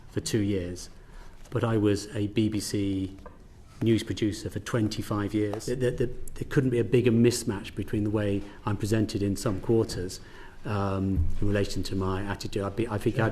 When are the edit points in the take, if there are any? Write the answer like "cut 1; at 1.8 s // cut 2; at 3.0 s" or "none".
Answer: cut 1; at 5.6 s